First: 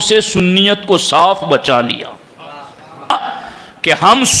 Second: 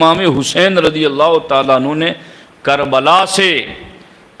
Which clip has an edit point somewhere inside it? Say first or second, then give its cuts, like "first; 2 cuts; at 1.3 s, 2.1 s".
first; 1 cut; at 3.1 s